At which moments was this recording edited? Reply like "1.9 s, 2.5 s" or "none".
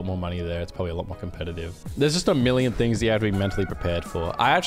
1.8 s

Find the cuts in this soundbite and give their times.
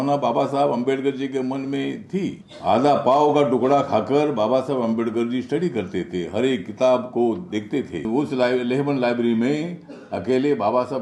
2.5 s, 8.1 s

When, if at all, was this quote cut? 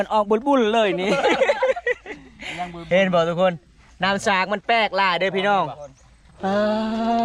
none

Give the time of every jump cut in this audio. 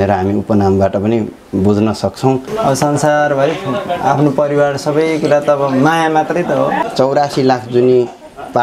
2.5 s, 6.8 s

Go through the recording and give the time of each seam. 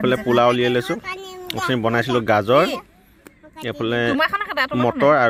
none

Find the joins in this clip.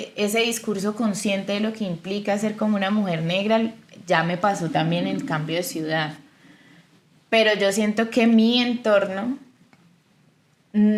none

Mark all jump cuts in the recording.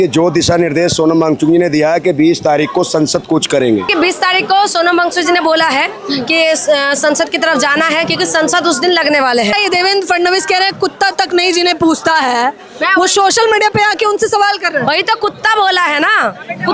3.9 s, 9.5 s

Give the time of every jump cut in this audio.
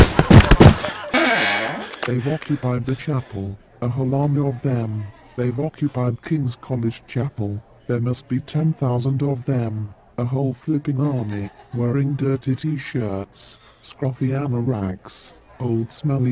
1.3 s

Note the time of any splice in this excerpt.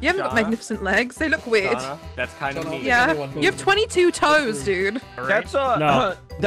3.3 s, 5.1 s

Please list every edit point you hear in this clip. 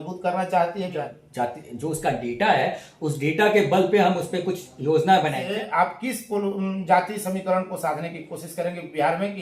1.0 s, 5.4 s

